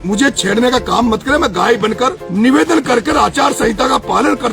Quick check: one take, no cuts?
no; 1 cut; at 2.2 s

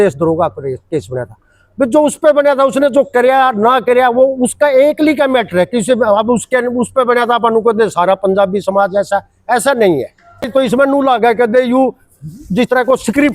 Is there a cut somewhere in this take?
yes; 1 cut; at 10.5 s

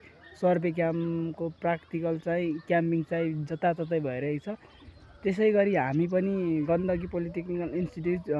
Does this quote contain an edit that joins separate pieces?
no; 0 cuts

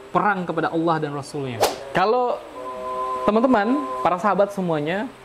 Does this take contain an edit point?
yes; 1 cut; at 1.7 s

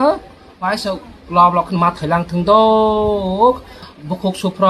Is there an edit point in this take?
yes; 1 cut; at 3.7 s

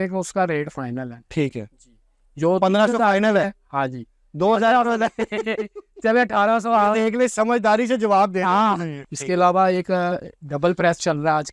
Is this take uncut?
no; 1 cut; at 8.9 s

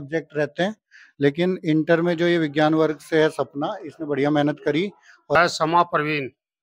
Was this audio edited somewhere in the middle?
yes; 1 cut; at 5.4 s

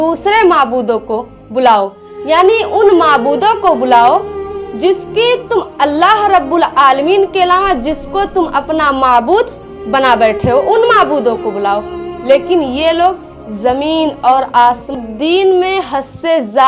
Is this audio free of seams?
no; 1 cut; at 15.0 s

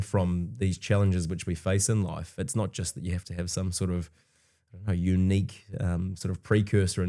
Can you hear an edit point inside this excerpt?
no; 0 cuts

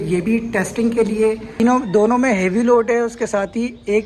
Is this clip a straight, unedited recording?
no; 1 cut; at 1.6 s

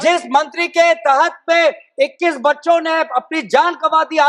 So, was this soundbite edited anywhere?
no; 0 cuts

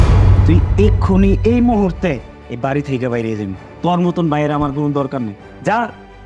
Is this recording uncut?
yes; 0 cuts

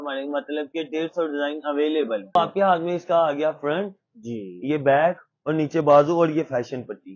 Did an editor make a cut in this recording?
yes; 1 cut; at 2.4 s

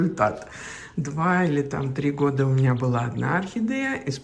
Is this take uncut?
yes; 0 cuts

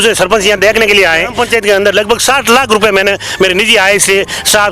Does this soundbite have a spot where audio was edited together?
yes; 1 cut; at 1.4 s

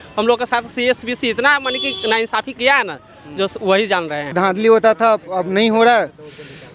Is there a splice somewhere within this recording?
yes; 1 cut; at 4.3 s

